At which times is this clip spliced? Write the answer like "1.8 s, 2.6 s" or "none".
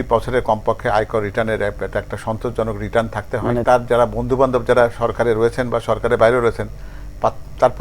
3.6 s